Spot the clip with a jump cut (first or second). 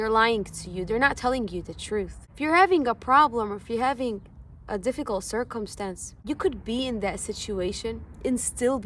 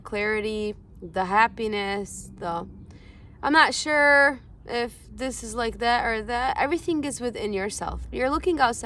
first